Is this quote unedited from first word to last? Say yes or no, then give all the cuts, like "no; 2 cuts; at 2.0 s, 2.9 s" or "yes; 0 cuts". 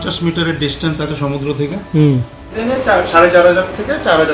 no; 1 cut; at 2.6 s